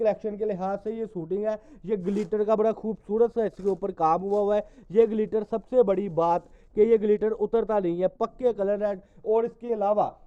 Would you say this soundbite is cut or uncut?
uncut